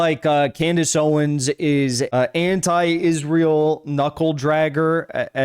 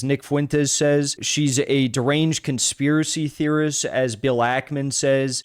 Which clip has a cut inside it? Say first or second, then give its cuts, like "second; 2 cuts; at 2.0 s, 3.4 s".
first; 1 cut; at 2.1 s